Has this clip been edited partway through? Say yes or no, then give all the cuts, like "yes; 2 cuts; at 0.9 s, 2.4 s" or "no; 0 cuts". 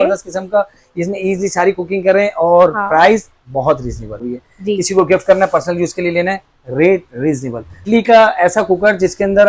yes; 2 cuts; at 4.3 s, 7.9 s